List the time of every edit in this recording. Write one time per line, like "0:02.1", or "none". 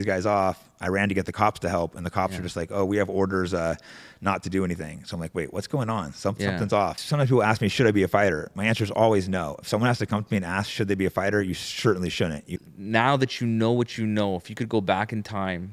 0:07.0
0:12.5

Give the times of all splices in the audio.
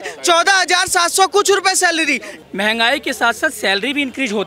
0:02.3

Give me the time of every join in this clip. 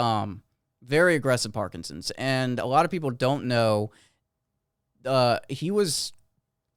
none

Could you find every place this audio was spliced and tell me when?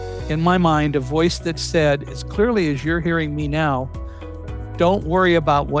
none

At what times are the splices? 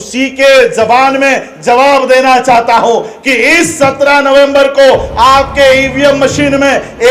none

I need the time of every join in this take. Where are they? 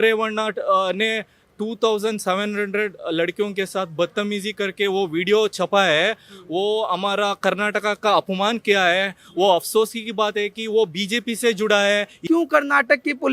0:12.2

